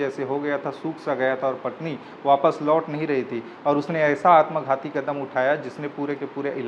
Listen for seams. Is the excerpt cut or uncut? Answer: uncut